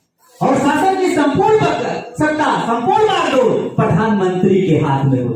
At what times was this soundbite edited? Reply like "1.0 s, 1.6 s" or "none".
none